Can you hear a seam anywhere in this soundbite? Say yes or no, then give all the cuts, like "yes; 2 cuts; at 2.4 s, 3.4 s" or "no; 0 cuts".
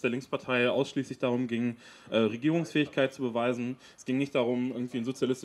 no; 0 cuts